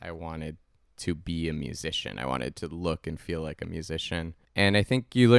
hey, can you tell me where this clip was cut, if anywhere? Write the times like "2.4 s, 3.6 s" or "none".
4.4 s